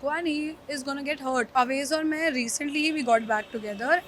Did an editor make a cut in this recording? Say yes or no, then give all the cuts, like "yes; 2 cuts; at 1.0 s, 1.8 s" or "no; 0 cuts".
yes; 1 cut; at 1.5 s